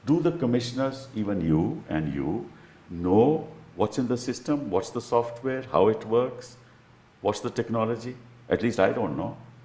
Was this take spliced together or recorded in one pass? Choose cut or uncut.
uncut